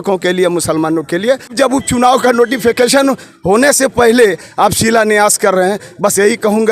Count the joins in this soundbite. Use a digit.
1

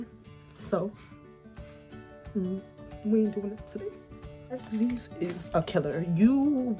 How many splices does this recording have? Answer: 1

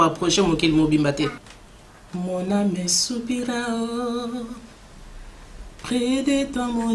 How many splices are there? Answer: 1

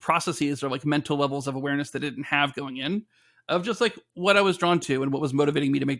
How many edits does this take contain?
0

